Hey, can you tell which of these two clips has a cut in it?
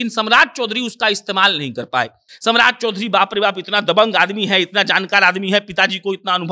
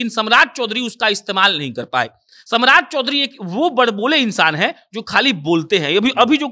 first; 1 cut; at 2.3 s

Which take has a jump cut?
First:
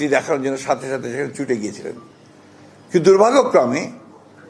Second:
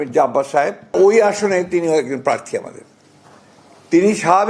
second; 1 cut; at 0.9 s

